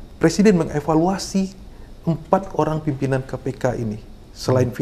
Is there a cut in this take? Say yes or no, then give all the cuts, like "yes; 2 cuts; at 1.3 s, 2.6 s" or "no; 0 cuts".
no; 0 cuts